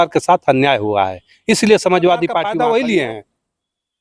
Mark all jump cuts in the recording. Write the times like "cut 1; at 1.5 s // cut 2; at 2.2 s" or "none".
cut 1; at 2.5 s